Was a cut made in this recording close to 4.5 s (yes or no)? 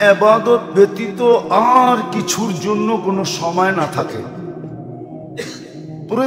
no